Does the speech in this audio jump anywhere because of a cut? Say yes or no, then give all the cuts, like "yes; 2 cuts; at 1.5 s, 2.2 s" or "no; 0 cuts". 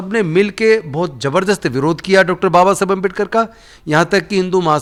no; 0 cuts